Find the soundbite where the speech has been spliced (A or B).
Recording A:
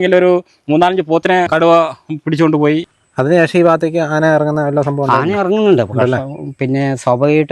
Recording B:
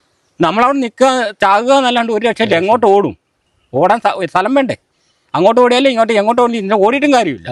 A